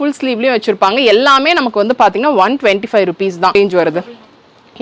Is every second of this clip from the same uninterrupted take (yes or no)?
no